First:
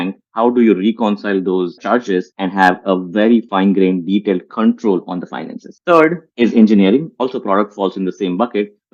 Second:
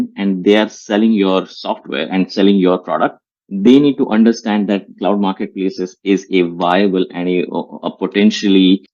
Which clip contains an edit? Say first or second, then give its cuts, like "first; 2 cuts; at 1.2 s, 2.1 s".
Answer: first; 4 cuts; at 1.9 s, 3.5 s, 6.2 s, 7.1 s